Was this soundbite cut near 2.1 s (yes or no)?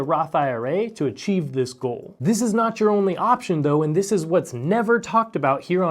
yes